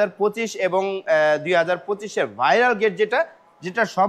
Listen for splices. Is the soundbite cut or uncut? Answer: uncut